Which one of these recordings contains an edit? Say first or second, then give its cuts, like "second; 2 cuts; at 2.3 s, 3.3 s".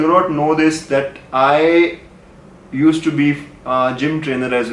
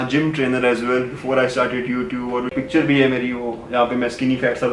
second; 1 cut; at 2.5 s